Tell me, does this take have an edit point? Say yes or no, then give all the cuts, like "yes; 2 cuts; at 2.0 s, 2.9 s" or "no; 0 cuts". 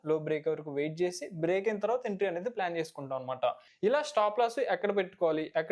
yes; 1 cut; at 3.7 s